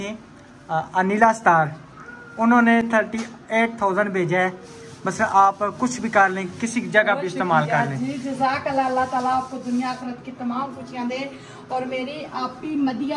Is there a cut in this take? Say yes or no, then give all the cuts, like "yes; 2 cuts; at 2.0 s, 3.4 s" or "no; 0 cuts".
no; 0 cuts